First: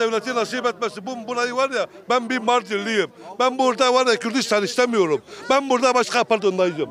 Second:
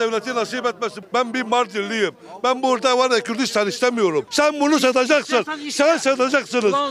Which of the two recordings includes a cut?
second; 2 cuts; at 1.0 s, 4.3 s

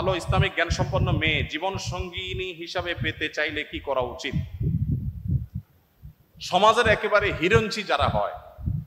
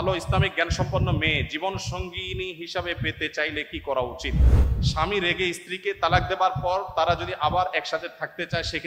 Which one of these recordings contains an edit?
second; 1 cut; at 4.5 s

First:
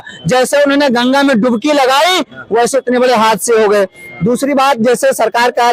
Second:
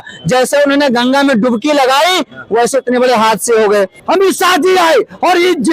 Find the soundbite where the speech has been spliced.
second; 1 cut; at 4.0 s

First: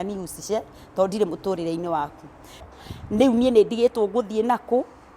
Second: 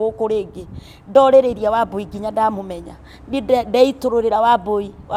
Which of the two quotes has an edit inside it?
first; 1 cut; at 2.6 s

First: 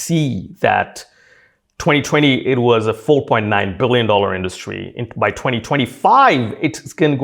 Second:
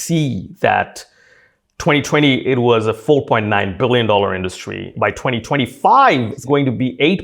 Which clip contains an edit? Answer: second; 2 cuts; at 4.9 s, 6.4 s

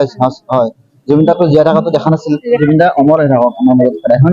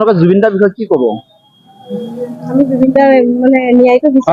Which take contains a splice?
first; 1 cut; at 2.6 s

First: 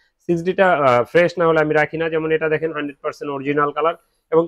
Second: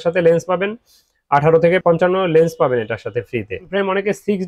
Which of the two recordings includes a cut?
second; 2 cuts; at 1.8 s, 3.6 s

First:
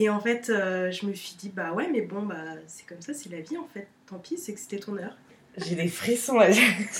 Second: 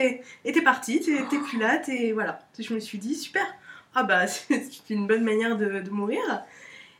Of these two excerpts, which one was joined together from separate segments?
first; 1 cut; at 5.2 s

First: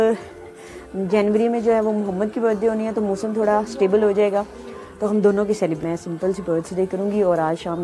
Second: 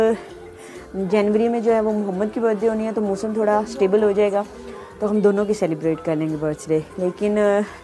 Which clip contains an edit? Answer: first; 1 cut; at 5.8 s

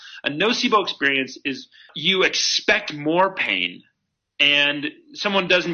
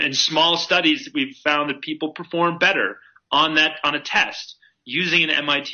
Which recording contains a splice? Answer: first; 1 cut; at 1.9 s

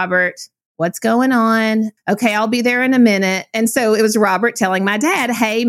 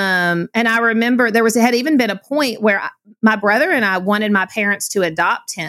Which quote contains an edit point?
first; 1 cut; at 1.9 s

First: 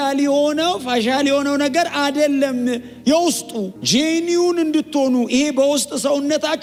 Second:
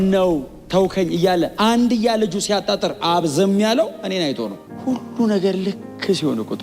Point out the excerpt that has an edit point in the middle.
second; 1 cut; at 4.6 s

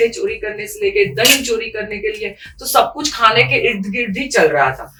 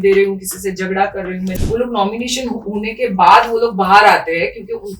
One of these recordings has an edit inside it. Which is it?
second; 1 cut; at 1.6 s

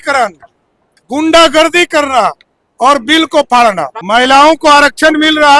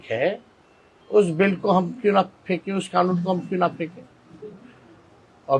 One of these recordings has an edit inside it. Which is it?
first; 1 cut; at 3.9 s

